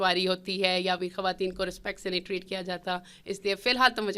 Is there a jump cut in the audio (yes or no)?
no